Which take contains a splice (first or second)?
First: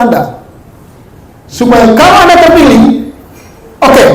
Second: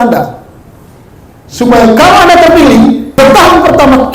second